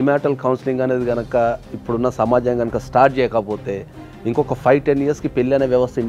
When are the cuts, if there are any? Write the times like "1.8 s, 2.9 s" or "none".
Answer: none